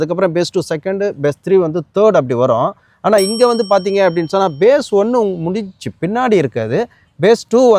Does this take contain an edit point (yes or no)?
no